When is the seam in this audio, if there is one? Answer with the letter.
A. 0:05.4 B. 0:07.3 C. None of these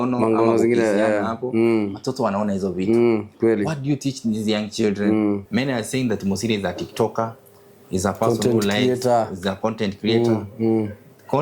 A